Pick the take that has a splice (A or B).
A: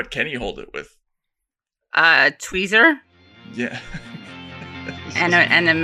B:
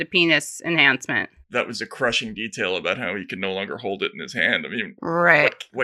B